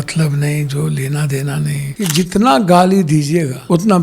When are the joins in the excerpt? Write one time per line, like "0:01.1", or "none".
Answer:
0:01.9